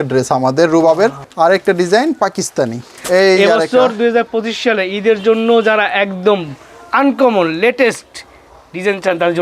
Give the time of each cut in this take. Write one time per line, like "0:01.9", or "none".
0:01.2
0:02.9